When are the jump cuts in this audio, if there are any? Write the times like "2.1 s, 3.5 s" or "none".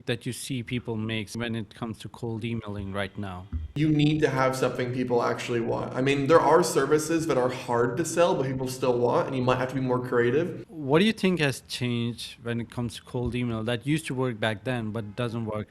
1.3 s, 3.7 s, 10.7 s